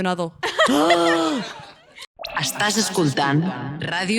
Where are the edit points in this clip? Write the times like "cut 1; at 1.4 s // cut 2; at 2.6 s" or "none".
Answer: cut 1; at 1.9 s